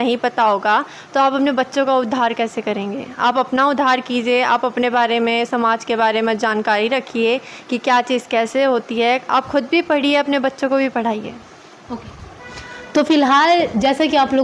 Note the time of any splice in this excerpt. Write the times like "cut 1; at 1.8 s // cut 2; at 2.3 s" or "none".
none